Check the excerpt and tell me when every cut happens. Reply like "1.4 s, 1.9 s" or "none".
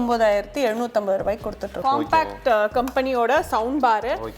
1.8 s